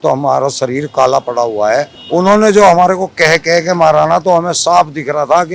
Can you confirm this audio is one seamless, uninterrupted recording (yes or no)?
no